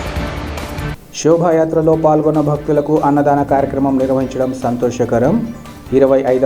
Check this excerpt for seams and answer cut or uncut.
cut